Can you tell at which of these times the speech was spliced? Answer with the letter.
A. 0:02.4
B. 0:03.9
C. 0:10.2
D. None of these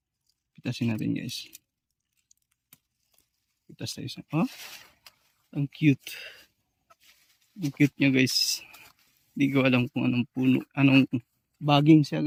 D